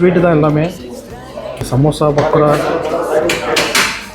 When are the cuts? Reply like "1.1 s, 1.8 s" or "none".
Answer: 1.7 s